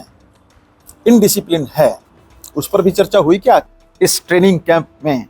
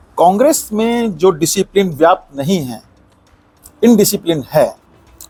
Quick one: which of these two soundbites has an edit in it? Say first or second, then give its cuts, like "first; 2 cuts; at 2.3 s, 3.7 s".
first; 1 cut; at 3.7 s